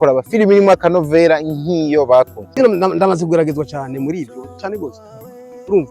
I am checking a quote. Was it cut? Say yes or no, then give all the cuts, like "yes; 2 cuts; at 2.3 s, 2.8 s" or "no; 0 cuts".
yes; 1 cut; at 2.6 s